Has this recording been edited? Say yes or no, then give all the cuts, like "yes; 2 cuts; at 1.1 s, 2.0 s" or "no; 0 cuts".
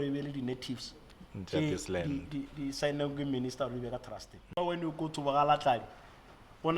yes; 1 cut; at 4.6 s